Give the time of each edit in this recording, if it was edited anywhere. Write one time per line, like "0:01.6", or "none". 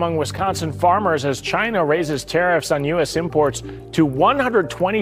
none